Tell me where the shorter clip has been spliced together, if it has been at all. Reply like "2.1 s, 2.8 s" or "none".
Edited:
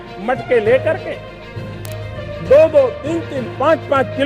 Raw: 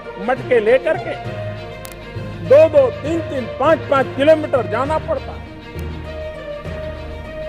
none